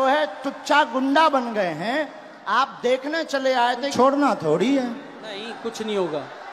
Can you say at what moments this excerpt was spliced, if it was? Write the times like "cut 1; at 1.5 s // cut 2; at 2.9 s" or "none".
cut 1; at 3.9 s